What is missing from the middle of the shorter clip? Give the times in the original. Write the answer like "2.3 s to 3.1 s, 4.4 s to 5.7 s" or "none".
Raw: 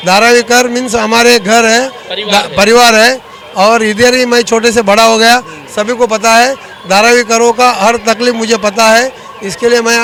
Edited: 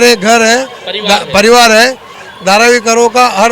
3.4 s to 6.6 s